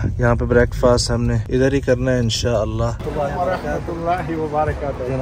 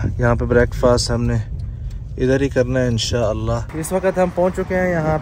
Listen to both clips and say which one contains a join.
first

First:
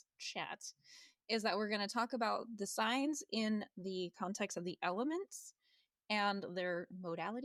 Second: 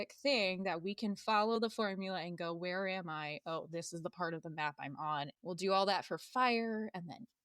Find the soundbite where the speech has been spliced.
second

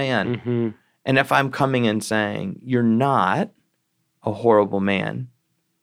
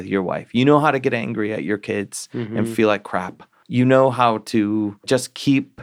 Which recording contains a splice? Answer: second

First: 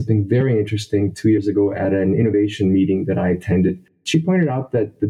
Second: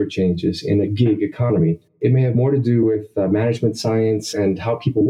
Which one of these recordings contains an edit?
second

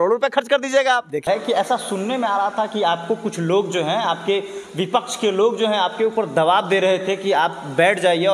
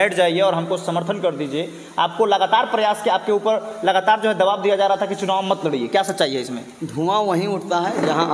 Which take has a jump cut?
first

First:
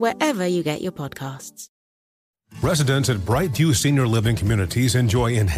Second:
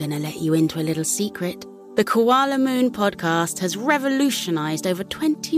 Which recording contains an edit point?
first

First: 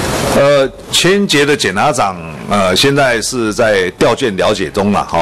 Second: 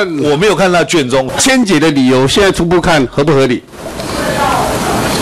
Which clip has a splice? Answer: second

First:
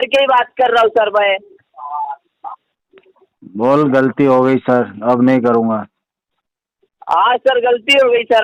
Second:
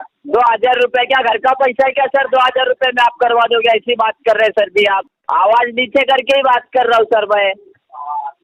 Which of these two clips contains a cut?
second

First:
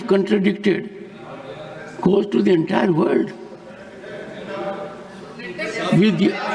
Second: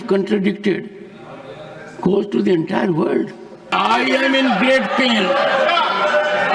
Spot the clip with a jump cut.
second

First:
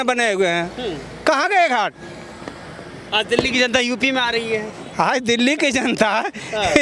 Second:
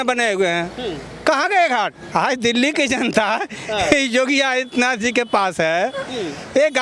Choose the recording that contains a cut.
second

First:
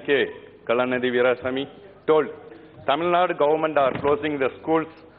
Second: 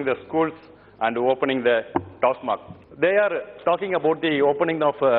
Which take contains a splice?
second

